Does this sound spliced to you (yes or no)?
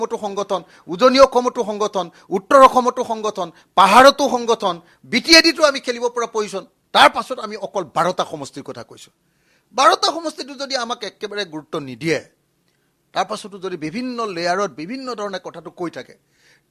no